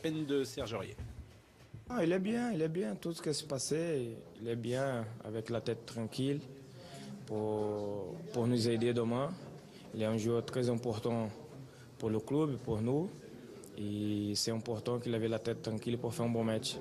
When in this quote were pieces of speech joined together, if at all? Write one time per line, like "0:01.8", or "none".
0:04.3